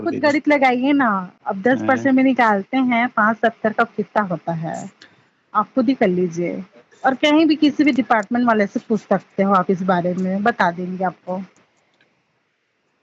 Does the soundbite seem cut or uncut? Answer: uncut